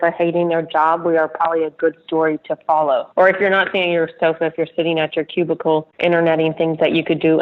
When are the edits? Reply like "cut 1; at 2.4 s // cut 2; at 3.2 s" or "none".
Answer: cut 1; at 3.1 s // cut 2; at 5.9 s

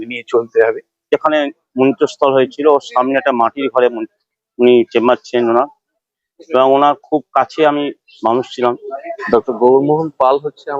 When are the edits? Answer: cut 1; at 0.9 s // cut 2; at 9.2 s

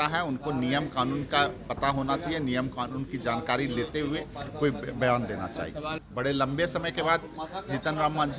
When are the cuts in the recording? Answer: cut 1; at 6.0 s

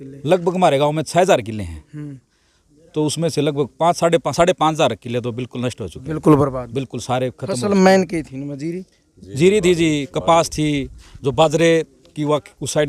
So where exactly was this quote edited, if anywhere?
none

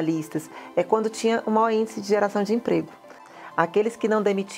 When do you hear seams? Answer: cut 1; at 3.3 s

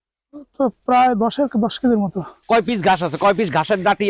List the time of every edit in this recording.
cut 1; at 2.3 s

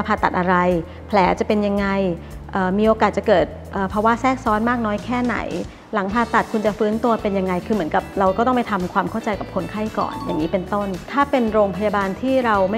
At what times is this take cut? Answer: none

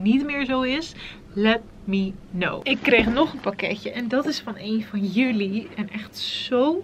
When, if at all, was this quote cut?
cut 1; at 2.6 s

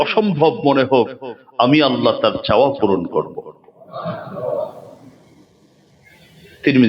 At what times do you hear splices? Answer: none

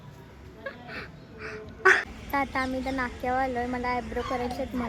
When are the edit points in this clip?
none

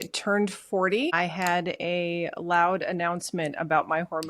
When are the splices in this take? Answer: cut 1; at 1.1 s

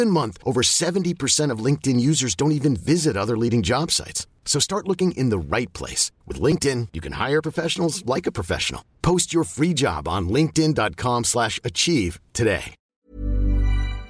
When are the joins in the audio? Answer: cut 1; at 12.8 s

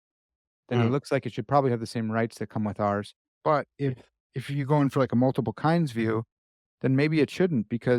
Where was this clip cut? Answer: none

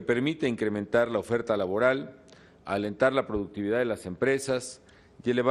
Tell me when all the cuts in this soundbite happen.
cut 1; at 3.2 s

